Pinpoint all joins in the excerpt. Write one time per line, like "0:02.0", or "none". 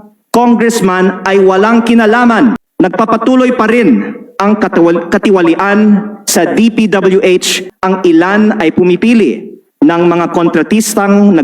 0:02.6
0:07.7